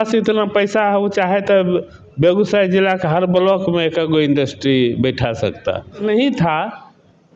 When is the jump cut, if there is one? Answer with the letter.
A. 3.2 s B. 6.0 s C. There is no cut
B